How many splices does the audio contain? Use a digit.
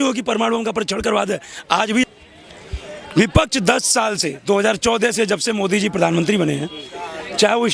1